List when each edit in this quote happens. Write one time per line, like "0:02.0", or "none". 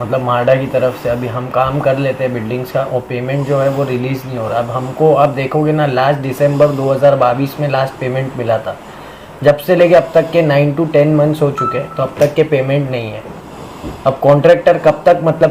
none